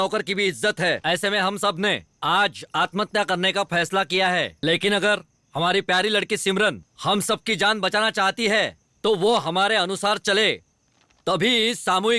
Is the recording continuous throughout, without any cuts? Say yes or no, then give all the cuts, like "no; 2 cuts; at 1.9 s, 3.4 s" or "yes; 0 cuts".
no; 2 cuts; at 4.5 s, 6.9 s